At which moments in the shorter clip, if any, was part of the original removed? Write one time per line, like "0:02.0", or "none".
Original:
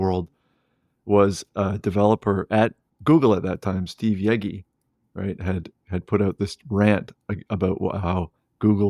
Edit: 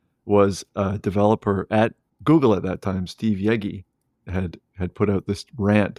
0:04.3